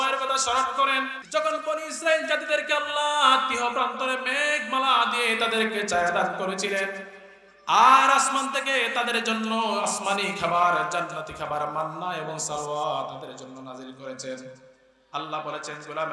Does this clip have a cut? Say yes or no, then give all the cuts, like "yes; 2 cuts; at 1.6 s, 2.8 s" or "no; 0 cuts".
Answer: yes; 1 cut; at 1.2 s